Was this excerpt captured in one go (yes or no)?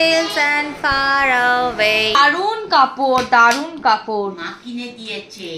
no